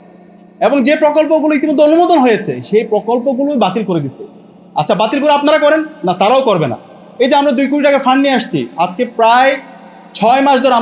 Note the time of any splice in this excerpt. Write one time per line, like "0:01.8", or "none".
none